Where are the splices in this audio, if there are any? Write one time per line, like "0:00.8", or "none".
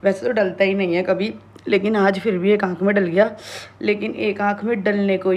none